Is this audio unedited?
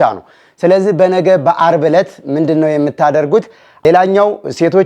no; 1 cut; at 3.7 s

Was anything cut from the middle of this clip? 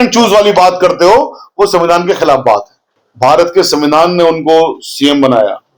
yes; 1 cut; at 2.8 s

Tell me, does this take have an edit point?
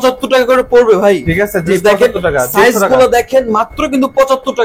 no; 0 cuts

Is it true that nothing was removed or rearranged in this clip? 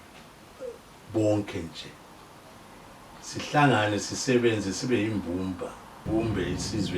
no; 1 cut; at 6.1 s

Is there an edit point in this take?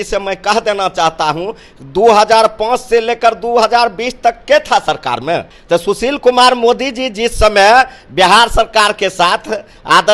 yes; 1 cut; at 5.5 s

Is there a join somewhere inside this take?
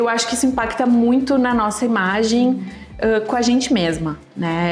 no; 0 cuts

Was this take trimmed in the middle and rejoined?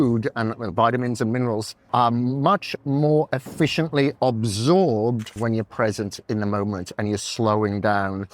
yes; 2 cuts; at 1.7 s, 5.3 s

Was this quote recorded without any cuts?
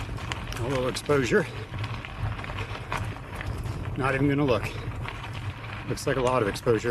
yes; 0 cuts

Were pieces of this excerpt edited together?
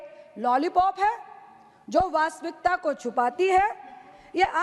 no; 0 cuts

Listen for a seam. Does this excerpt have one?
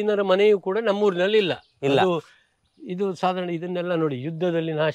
no; 0 cuts

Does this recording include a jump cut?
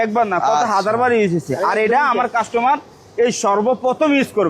no; 0 cuts

